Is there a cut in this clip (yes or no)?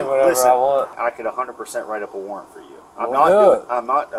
yes